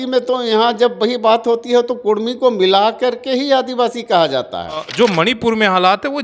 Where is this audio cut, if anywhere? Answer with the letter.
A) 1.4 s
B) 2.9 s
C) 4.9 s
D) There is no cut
C